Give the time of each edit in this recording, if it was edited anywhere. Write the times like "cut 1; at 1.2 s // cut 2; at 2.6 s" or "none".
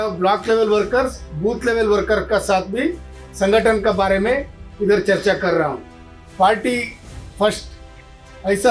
cut 1; at 6.2 s